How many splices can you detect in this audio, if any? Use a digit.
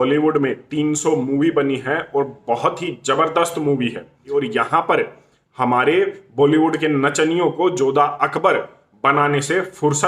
1